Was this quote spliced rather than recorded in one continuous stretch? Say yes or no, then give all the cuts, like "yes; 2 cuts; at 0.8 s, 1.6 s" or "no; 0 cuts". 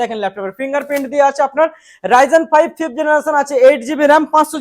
no; 0 cuts